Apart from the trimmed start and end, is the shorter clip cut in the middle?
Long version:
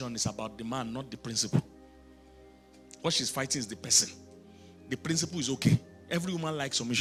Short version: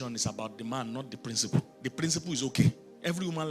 yes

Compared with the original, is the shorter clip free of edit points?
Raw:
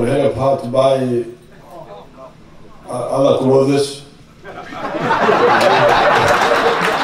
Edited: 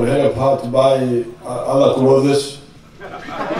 no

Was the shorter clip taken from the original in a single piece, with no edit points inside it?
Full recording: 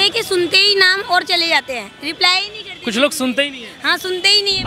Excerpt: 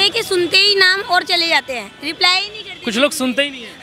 yes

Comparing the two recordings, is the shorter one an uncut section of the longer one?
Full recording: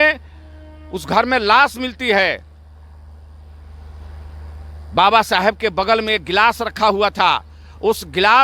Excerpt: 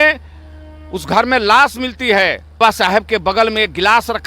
no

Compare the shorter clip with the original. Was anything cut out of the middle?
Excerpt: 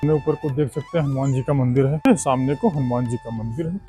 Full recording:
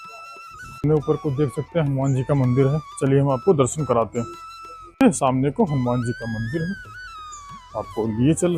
yes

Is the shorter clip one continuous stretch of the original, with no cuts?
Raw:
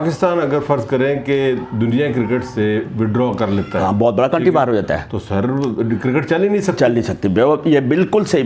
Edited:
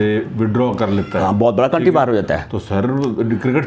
yes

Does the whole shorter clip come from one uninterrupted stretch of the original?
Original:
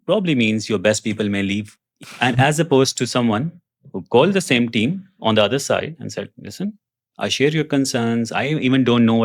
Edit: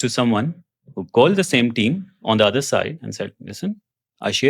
yes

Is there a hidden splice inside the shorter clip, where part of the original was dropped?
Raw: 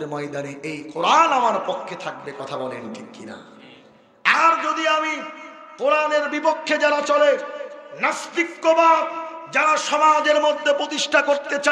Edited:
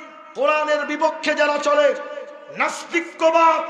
no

